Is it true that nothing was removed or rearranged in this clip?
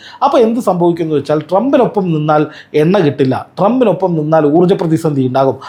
yes; 0 cuts

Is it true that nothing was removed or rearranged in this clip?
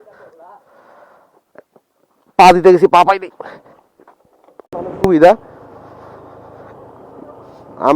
no; 1 cut; at 4.7 s

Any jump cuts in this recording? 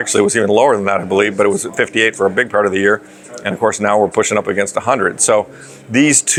no; 0 cuts

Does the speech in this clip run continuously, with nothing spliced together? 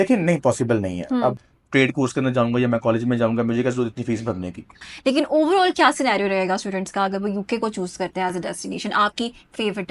no; 2 cuts; at 1.4 s, 4.9 s

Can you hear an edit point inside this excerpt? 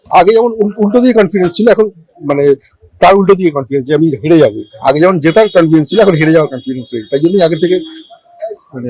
no; 0 cuts

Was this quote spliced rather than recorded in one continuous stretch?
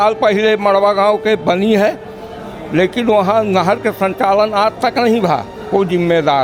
no; 0 cuts

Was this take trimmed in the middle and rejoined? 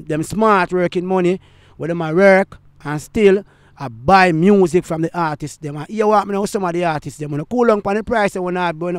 no; 0 cuts

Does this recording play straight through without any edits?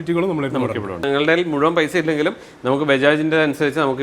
no; 1 cut; at 1.0 s

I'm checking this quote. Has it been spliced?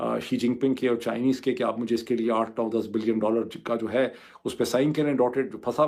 no; 0 cuts

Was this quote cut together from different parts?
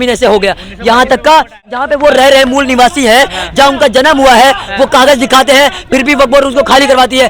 yes; 1 cut; at 1.6 s

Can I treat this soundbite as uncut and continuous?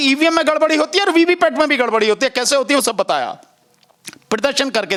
yes; 0 cuts

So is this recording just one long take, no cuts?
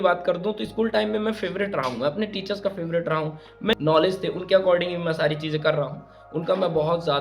no; 1 cut; at 3.7 s

